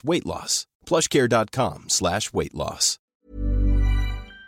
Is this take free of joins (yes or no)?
no